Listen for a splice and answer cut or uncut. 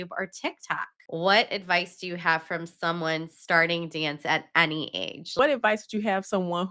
cut